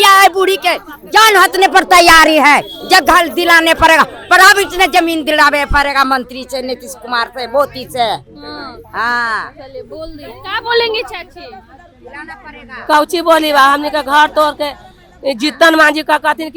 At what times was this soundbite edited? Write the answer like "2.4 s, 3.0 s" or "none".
none